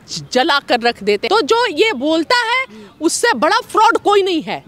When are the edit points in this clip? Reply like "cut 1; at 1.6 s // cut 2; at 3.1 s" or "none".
cut 1; at 1.2 s